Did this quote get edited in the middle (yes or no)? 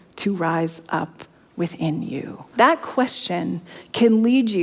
yes